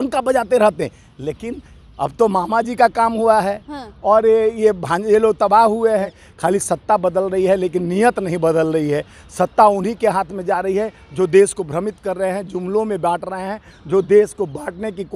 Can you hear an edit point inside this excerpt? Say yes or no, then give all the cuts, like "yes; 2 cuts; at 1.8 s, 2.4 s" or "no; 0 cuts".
no; 0 cuts